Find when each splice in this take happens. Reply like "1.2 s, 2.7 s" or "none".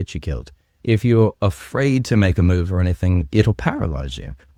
none